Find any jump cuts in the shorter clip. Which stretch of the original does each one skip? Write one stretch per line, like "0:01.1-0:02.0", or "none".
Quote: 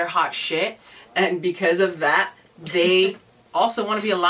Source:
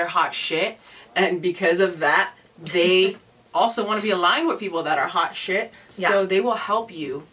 none